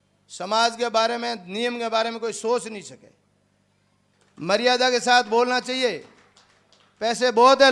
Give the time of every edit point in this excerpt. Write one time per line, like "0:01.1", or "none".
0:04.1